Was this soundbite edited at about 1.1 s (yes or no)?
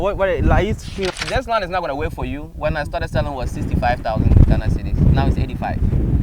yes